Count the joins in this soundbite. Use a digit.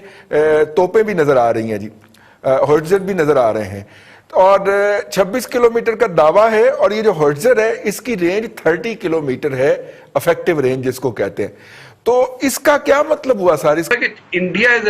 1